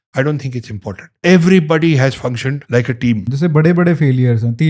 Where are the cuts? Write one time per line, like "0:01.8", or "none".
0:01.1
0:02.6
0:03.3